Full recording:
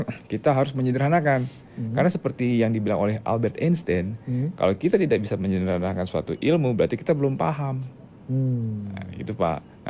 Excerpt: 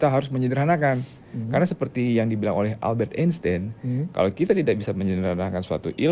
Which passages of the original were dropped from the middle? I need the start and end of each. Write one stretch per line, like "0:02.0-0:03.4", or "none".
none